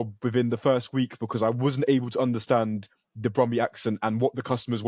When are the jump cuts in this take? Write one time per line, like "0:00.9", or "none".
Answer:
none